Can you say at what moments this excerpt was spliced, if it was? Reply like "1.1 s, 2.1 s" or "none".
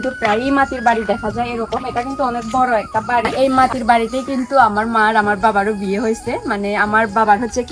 3.3 s